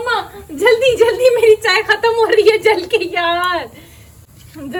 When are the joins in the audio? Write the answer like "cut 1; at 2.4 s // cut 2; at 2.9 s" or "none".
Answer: none